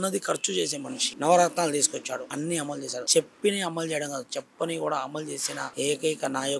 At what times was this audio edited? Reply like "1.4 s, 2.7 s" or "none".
1.0 s, 2.7 s, 5.6 s